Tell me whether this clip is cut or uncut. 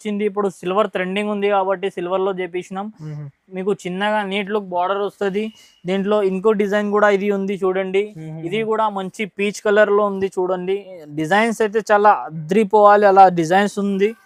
uncut